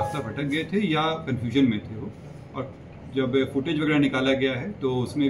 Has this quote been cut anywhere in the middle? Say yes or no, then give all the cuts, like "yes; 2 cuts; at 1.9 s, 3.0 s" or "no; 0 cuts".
no; 0 cuts